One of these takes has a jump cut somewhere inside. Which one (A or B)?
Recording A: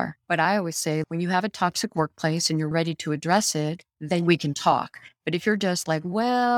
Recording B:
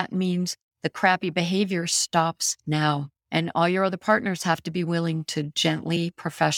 A